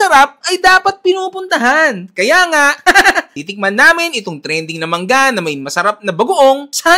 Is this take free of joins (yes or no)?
yes